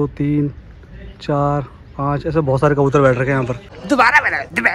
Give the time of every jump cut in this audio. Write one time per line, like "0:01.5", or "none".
0:03.7

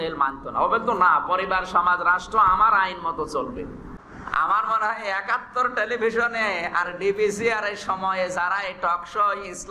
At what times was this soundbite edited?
0:03.9

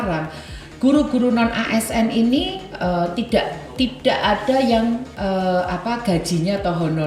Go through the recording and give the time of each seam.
none

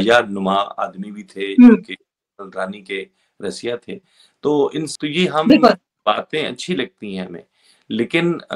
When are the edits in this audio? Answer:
0:04.9

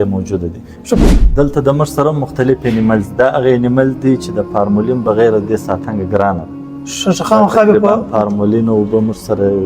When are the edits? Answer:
0:01.0

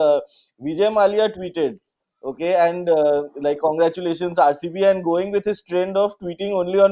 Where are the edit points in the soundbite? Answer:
none

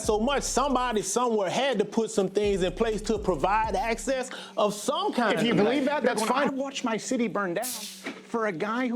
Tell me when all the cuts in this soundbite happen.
0:06.5

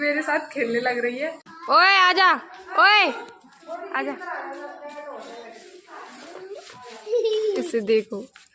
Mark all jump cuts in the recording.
0:01.5

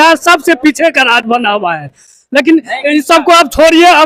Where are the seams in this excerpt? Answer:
none

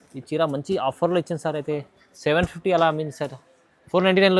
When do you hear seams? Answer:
none

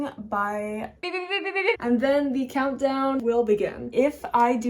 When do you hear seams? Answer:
0:01.2
0:03.4

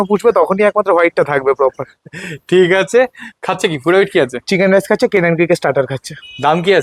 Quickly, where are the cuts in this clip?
none

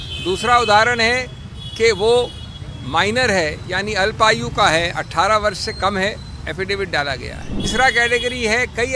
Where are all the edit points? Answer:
0:07.7

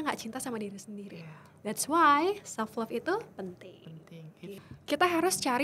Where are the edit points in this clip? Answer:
0:04.6

